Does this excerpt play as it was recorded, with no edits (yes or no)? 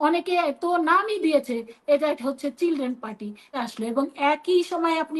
no